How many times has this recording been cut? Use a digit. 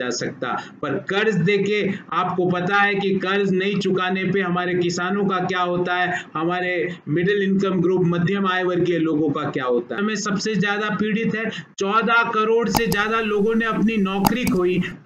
1